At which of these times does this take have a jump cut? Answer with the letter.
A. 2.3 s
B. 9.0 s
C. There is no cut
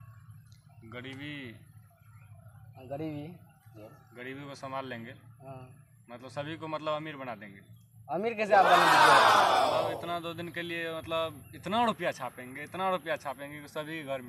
C